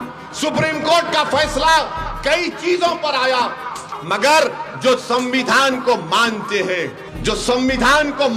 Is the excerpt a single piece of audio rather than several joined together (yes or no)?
no